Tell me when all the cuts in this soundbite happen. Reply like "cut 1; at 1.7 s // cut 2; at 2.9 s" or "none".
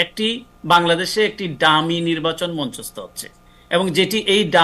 none